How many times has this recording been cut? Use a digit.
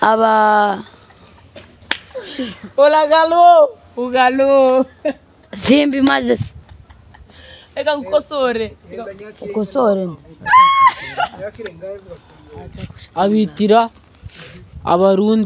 0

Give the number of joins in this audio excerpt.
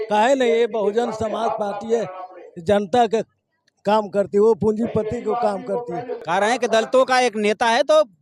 1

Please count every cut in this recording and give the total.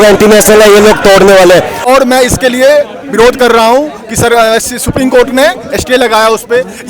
1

